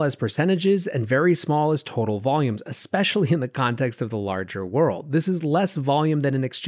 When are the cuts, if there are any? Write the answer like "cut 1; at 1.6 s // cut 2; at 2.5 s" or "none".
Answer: none